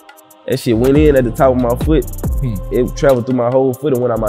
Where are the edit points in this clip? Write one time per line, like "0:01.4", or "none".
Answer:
none